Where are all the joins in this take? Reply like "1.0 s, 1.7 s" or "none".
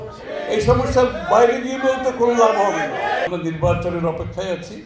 3.3 s